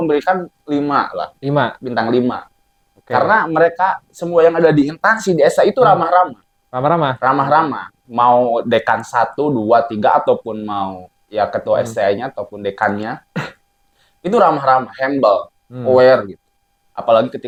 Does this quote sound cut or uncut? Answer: uncut